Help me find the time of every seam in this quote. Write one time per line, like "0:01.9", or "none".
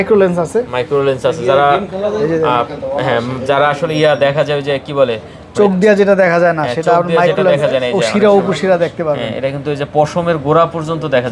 none